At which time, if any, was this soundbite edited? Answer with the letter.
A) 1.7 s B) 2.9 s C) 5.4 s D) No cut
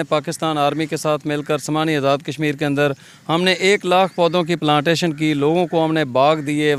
D